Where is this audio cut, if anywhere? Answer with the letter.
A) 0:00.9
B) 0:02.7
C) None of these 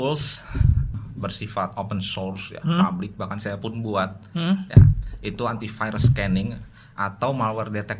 A